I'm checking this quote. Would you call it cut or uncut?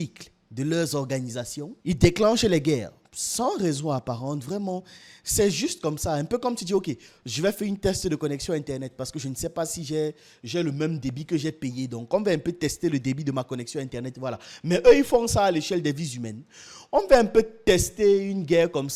uncut